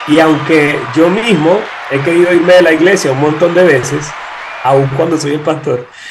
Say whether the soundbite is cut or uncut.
uncut